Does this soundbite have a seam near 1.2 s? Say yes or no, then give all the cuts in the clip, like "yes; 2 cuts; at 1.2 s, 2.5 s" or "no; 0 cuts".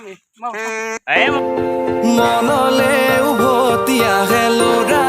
yes; 1 cut; at 1.2 s